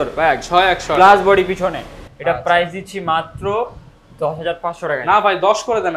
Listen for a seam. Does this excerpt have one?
no; 0 cuts

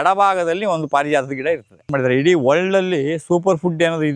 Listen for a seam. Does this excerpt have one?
yes; 1 cut; at 1.9 s

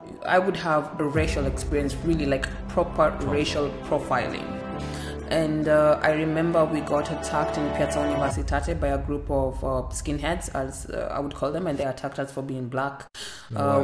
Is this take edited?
no; 0 cuts

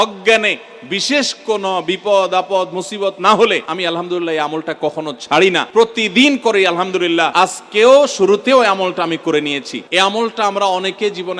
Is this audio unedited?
no; 4 cuts; at 3.7 s, 5.7 s, 7.3 s, 9.7 s

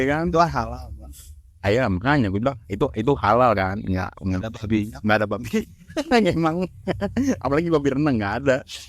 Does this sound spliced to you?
no; 0 cuts

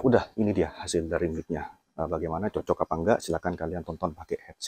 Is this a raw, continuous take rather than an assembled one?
yes; 0 cuts

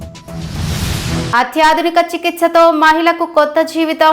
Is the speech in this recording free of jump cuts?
yes; 0 cuts

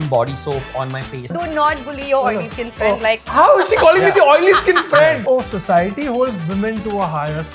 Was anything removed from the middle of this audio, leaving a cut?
yes; 3 cuts; at 1.3 s, 3.2 s, 5.2 s

